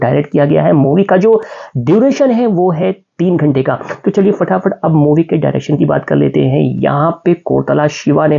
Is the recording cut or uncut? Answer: uncut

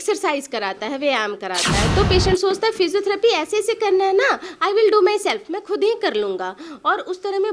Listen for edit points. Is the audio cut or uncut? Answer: cut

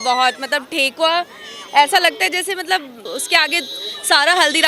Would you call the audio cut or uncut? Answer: cut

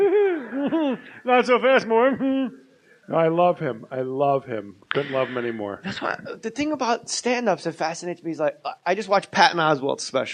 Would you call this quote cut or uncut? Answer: cut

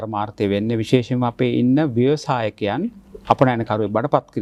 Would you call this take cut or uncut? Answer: uncut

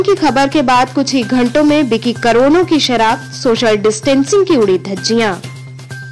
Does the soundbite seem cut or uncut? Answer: uncut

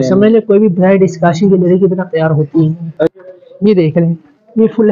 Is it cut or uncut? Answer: cut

